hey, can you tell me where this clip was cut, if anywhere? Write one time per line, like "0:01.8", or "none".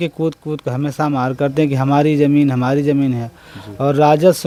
none